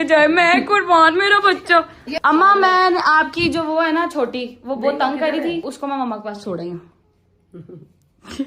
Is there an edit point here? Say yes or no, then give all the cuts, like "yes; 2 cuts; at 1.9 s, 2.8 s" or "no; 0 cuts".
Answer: yes; 2 cuts; at 2.0 s, 5.7 s